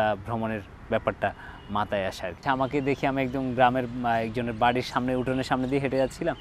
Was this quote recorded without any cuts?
no; 1 cut; at 2.4 s

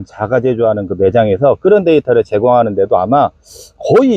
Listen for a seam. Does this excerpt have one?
no; 0 cuts

